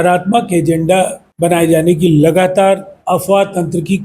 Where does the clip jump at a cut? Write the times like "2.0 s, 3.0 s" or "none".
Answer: 1.2 s, 2.9 s